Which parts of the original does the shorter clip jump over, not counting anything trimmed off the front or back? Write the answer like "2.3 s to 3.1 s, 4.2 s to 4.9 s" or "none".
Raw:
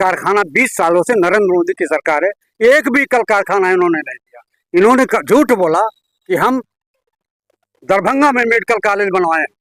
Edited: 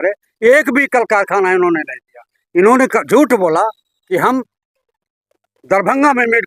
none